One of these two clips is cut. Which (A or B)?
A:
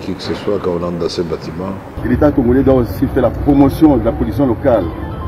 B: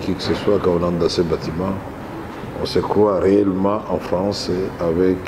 A